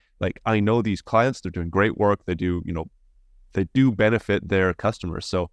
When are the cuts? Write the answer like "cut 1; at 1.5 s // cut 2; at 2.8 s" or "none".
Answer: none

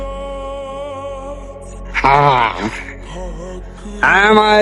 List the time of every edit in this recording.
none

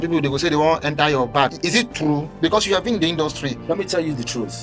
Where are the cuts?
cut 1; at 1.6 s

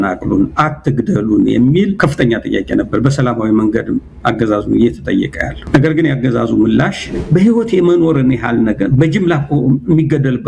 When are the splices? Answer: cut 1; at 2.0 s // cut 2; at 5.5 s // cut 3; at 7.1 s

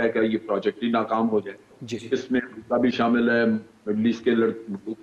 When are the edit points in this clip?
none

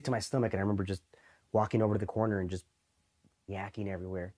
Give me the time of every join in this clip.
cut 1; at 3.4 s

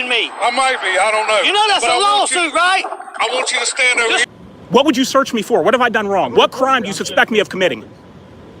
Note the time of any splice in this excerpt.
cut 1; at 4.2 s

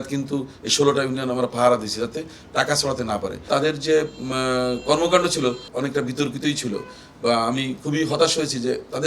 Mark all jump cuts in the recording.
cut 1; at 3.5 s // cut 2; at 5.7 s

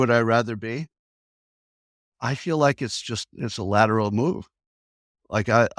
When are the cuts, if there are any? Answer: none

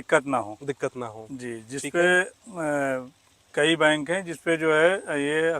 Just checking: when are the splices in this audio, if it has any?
none

